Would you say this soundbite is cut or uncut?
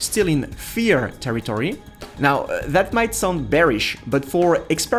uncut